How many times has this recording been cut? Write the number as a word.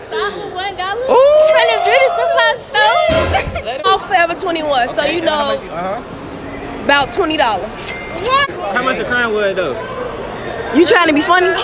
two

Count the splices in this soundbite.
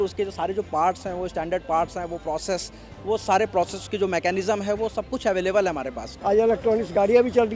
one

